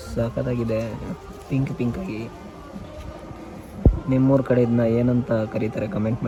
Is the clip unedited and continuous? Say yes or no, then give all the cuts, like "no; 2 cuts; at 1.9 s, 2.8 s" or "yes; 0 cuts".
yes; 0 cuts